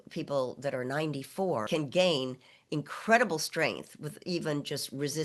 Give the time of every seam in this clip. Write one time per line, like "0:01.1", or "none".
0:01.7